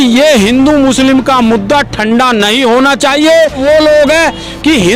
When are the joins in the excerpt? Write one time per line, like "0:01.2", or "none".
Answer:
0:03.6